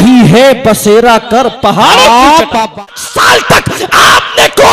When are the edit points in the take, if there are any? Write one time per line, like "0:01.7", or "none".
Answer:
0:02.8